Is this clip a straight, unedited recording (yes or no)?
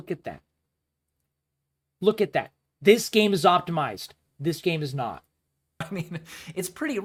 yes